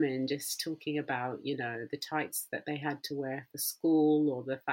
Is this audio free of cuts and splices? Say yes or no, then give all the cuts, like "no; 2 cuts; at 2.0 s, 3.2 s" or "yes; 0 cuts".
yes; 0 cuts